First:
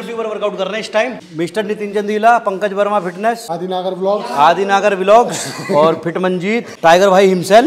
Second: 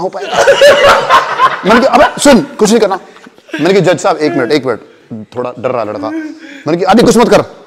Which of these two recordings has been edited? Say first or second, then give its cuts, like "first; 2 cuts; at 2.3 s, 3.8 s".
first; 3 cuts; at 1.2 s, 3.5 s, 6.7 s